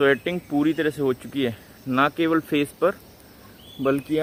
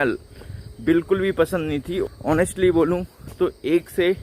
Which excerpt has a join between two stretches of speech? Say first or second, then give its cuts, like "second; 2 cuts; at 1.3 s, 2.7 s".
second; 1 cut; at 2.1 s